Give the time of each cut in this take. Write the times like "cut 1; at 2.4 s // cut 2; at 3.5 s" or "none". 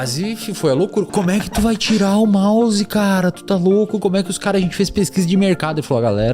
cut 1; at 1.1 s